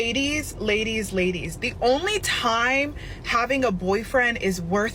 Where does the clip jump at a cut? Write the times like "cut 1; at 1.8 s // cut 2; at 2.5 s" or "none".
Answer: none